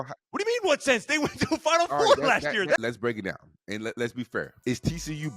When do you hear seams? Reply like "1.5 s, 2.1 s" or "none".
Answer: 2.8 s, 4.5 s